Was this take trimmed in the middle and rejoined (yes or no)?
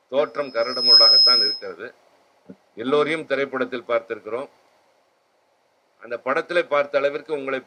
no